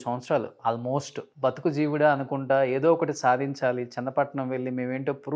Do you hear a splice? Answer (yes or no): yes